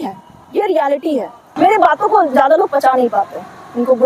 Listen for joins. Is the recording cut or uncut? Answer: cut